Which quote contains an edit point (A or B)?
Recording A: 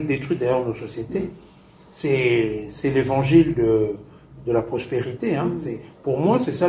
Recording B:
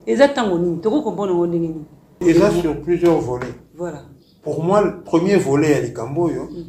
B